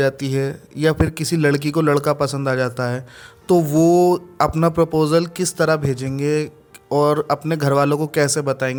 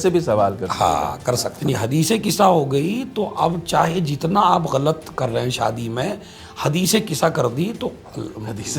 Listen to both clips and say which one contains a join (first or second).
second